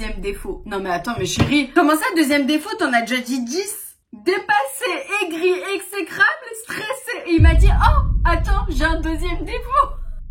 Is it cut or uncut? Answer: cut